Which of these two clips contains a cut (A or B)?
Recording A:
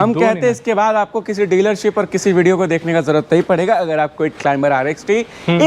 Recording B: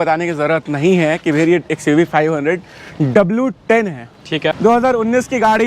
B